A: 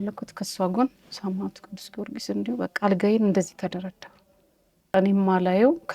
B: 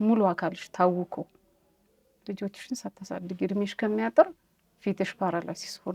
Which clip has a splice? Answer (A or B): A